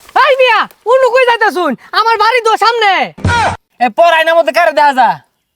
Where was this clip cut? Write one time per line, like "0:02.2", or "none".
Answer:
0:03.2